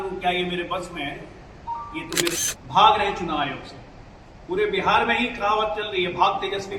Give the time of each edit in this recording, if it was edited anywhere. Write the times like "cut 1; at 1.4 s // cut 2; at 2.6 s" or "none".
cut 1; at 2.5 s